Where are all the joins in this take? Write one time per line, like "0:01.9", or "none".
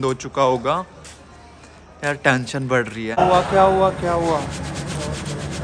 0:03.2